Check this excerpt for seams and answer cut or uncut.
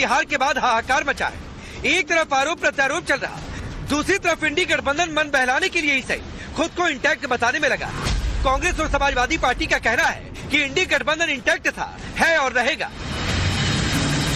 uncut